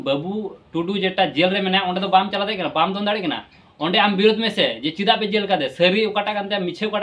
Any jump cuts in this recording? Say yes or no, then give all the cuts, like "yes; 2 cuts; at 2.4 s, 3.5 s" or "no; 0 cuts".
no; 0 cuts